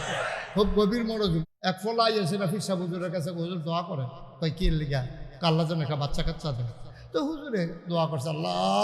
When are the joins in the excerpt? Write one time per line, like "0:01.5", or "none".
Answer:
0:01.4